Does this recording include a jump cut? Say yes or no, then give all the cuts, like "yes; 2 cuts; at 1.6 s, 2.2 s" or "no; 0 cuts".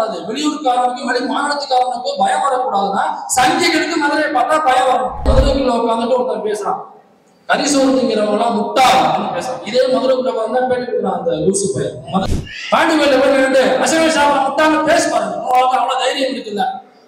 yes; 2 cuts; at 5.3 s, 12.2 s